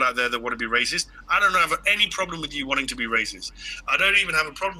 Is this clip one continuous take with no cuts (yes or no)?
yes